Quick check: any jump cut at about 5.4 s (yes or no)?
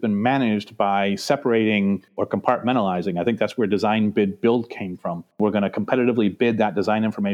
yes